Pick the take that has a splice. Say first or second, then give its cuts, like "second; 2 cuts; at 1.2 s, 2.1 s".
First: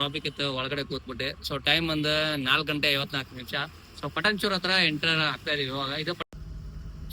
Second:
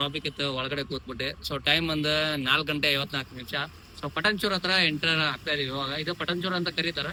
first; 1 cut; at 6.2 s